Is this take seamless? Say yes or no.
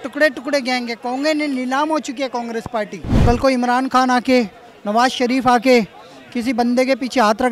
no